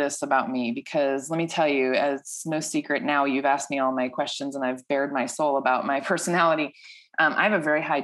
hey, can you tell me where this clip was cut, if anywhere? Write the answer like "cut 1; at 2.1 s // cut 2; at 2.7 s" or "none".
none

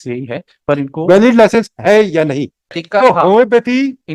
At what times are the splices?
cut 1; at 2.8 s

